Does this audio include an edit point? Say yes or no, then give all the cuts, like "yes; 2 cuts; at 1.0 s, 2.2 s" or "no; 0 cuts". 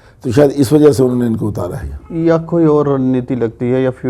no; 0 cuts